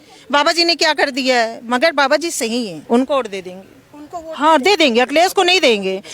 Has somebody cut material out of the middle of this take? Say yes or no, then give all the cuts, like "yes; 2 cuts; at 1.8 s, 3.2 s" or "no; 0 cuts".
yes; 1 cut; at 2.8 s